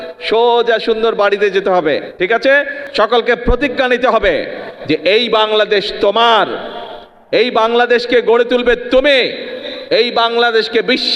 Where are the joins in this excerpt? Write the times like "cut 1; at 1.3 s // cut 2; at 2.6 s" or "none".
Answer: cut 1; at 2.8 s